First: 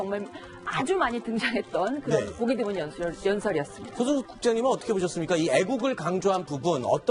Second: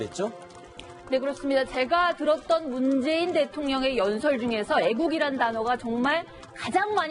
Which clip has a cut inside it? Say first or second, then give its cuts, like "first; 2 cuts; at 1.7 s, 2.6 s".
first; 1 cut; at 3.3 s